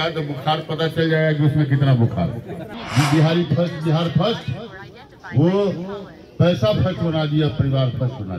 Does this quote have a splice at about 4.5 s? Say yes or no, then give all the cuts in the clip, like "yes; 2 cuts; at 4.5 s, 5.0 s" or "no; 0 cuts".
no; 1 cut; at 2.8 s